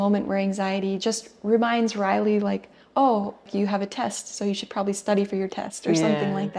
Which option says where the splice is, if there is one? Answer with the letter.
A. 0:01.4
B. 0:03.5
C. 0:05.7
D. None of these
B